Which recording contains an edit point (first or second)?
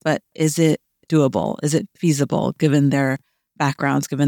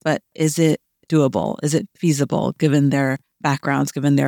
second